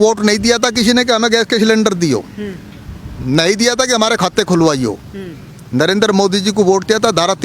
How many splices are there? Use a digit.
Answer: 0